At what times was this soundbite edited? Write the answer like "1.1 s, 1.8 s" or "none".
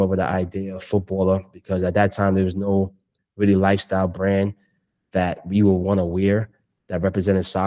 none